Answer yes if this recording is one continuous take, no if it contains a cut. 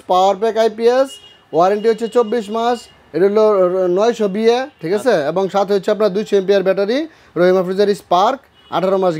yes